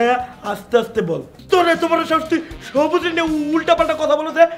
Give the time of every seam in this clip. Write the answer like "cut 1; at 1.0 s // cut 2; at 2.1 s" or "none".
cut 1; at 1.3 s